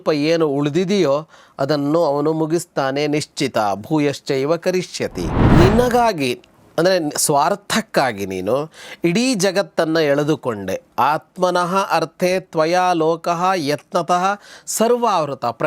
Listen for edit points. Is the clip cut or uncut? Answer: cut